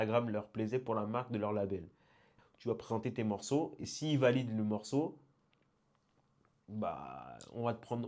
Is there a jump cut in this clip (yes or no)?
yes